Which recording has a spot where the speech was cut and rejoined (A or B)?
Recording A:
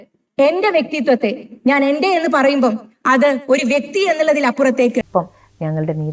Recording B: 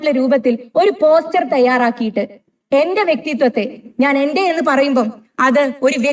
A